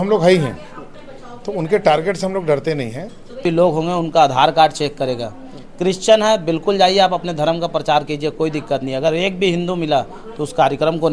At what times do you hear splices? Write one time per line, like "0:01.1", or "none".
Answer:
0:03.4